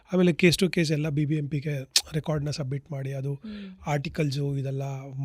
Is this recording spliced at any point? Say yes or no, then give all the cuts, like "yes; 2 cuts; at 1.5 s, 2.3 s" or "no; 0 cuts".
no; 0 cuts